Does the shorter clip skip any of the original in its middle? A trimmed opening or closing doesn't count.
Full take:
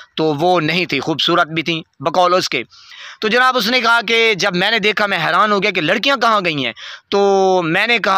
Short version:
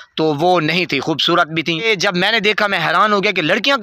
yes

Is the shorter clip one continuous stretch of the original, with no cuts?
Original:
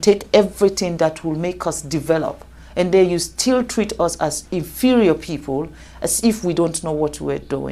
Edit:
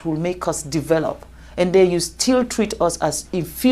yes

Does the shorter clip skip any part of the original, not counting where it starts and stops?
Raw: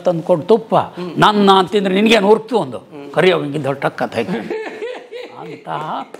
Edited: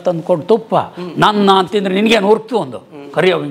no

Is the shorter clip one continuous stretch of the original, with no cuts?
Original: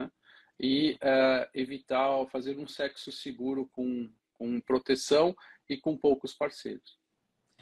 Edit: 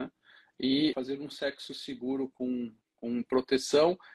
no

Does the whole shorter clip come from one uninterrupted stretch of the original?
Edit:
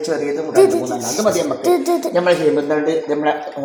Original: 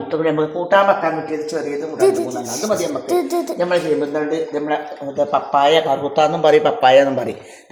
yes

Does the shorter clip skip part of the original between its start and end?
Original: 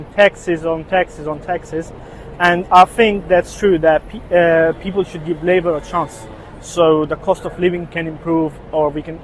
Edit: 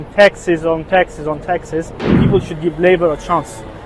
yes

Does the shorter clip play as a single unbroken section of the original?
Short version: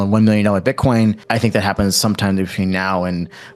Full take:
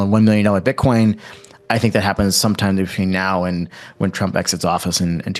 no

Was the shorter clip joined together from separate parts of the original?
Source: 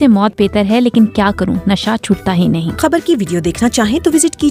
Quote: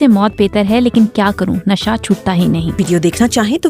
yes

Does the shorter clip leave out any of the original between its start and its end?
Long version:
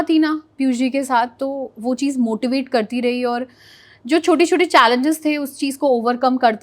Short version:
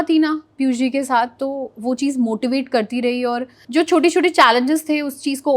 yes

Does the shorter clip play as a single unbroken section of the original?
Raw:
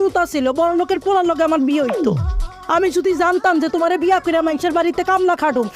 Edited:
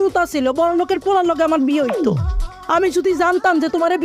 yes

